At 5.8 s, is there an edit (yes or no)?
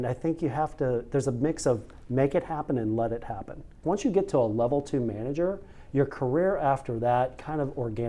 no